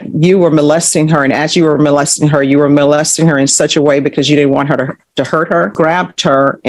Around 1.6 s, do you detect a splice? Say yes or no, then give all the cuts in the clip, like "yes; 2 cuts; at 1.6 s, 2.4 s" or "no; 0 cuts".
no; 1 cut; at 5.7 s